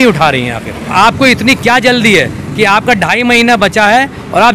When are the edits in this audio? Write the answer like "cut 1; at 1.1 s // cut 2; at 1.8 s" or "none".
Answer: cut 1; at 0.9 s